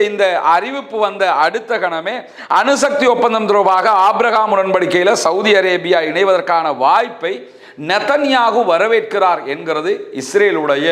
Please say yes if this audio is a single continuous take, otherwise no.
yes